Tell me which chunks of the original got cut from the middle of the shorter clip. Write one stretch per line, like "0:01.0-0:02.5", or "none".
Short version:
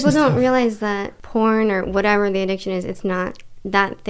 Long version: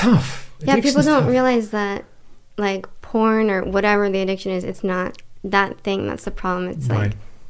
0:02.1-0:03.0